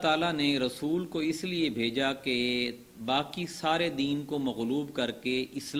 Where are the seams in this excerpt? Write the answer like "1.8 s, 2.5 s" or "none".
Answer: none